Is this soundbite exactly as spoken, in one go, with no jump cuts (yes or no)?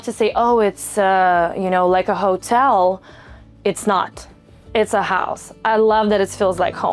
yes